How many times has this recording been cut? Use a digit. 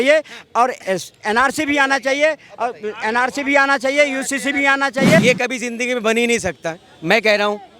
1